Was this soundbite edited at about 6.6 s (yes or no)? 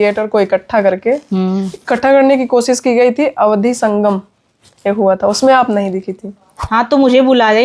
yes